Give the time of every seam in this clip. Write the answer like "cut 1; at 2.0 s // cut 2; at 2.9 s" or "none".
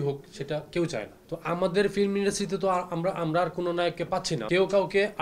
cut 1; at 1.2 s // cut 2; at 4.4 s